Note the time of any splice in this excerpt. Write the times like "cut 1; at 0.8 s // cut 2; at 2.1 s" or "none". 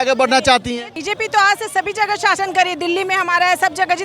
cut 1; at 1.0 s